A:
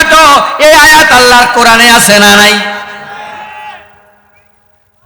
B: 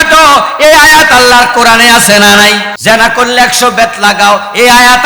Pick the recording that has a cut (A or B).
B